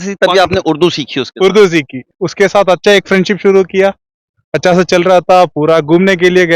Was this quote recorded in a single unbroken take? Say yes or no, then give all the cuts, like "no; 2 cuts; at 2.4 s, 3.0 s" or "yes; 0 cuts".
no; 1 cut; at 2.1 s